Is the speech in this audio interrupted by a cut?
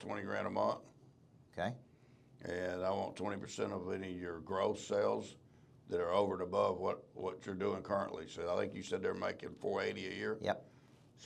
no; 0 cuts

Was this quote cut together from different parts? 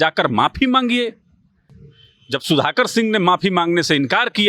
no; 0 cuts

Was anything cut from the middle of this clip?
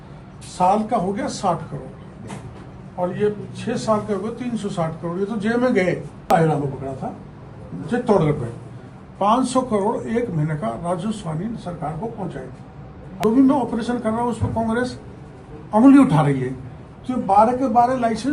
yes; 2 cuts; at 6.3 s, 13.2 s

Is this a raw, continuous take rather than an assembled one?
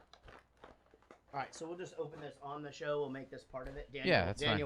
yes; 0 cuts

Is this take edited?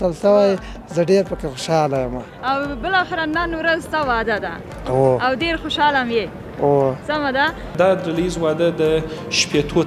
yes; 1 cut; at 7.7 s

